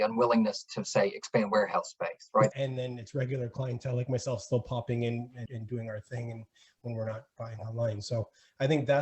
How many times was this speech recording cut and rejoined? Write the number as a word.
two